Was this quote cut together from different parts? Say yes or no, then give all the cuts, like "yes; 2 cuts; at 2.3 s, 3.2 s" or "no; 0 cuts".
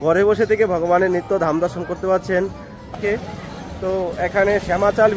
yes; 1 cut; at 2.9 s